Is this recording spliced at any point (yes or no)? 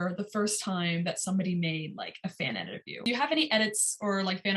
yes